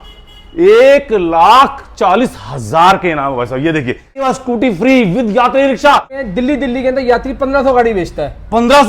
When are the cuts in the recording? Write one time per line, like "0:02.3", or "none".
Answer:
0:04.3
0:06.2